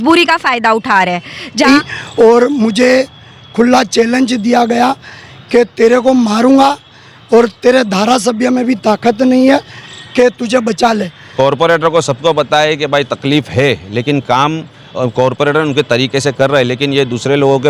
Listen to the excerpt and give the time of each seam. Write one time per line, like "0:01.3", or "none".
0:01.7
0:11.2